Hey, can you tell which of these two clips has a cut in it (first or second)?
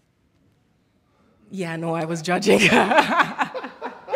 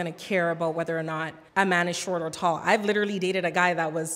second